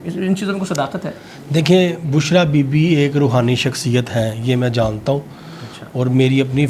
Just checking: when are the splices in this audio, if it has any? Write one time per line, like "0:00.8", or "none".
none